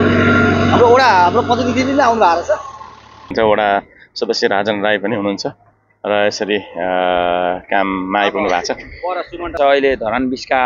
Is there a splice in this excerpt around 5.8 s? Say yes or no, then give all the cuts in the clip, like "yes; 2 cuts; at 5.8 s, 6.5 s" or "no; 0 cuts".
no; 2 cuts; at 3.3 s, 9.5 s